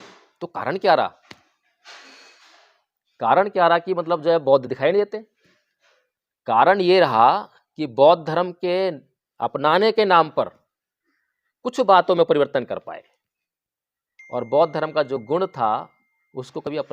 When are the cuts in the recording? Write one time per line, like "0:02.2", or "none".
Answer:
none

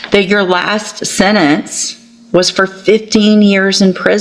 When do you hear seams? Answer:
none

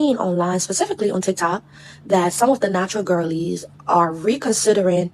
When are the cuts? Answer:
none

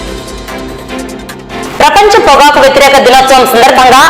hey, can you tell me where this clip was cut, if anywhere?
0:01.6

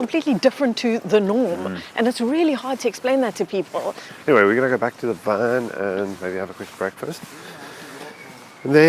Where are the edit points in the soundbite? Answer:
none

